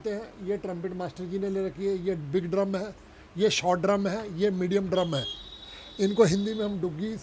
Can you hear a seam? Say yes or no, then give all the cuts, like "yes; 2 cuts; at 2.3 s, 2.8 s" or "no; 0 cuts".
no; 0 cuts